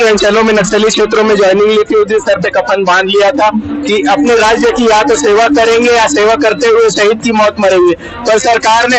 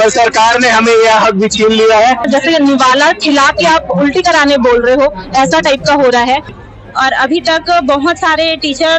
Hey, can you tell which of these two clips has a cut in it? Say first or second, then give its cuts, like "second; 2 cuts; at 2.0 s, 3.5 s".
second; 2 cuts; at 2.2 s, 6.5 s